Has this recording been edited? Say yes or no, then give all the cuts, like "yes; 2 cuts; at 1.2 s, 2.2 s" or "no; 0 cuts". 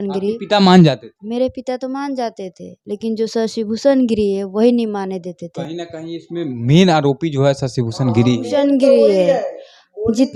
no; 0 cuts